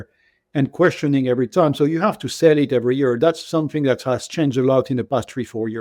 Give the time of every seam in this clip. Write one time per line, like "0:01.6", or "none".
none